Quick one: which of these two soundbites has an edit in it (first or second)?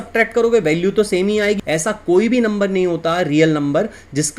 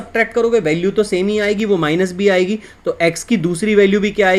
first